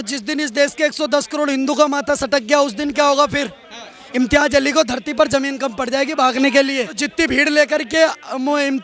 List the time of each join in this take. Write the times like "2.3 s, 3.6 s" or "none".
7.0 s